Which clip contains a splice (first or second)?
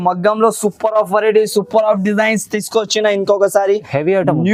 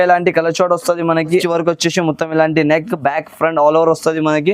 second